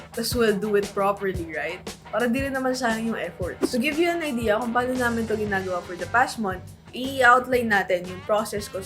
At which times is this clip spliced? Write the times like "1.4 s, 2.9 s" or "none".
3.6 s